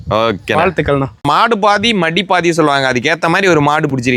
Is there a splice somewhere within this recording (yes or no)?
yes